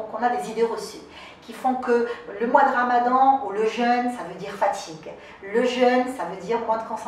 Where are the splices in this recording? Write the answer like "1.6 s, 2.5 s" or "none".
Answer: none